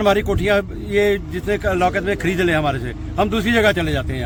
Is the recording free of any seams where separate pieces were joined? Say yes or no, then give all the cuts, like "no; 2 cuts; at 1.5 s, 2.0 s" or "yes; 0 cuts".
yes; 0 cuts